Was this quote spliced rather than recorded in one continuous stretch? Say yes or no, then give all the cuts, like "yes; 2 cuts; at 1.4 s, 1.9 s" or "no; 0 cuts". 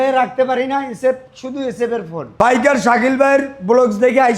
yes; 1 cut; at 2.3 s